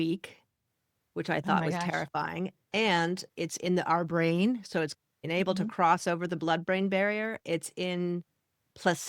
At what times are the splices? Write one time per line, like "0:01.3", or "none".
0:05.2